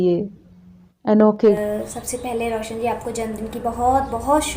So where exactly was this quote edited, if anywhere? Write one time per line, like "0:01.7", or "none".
0:01.6